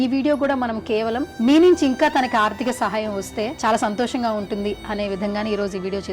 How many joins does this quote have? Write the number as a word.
two